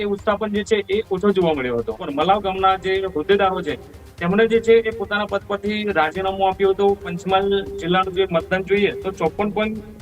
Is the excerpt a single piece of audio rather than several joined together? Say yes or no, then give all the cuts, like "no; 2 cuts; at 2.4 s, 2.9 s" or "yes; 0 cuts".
no; 2 cuts; at 2.1 s, 7.1 s